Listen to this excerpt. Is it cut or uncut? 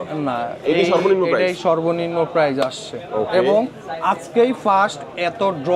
uncut